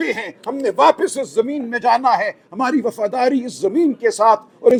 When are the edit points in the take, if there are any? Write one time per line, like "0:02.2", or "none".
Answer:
none